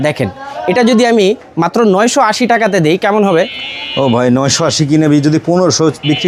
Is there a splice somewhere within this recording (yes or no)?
no